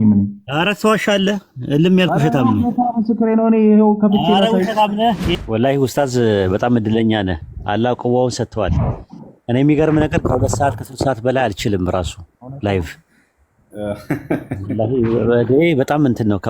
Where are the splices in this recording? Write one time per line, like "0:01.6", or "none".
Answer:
0:05.3